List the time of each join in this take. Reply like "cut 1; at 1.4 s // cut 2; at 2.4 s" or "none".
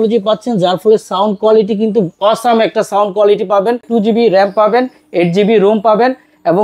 cut 1; at 3.9 s